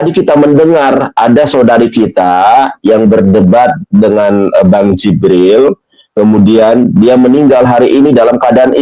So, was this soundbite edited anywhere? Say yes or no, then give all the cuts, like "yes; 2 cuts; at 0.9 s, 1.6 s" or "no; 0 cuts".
no; 0 cuts